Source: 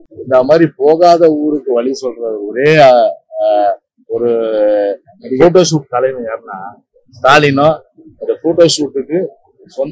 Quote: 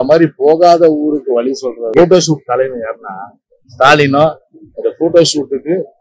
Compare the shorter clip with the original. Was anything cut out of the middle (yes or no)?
yes